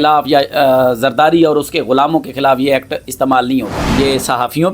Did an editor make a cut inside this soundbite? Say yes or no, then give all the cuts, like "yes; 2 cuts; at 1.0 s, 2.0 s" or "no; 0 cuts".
yes; 1 cut; at 3.8 s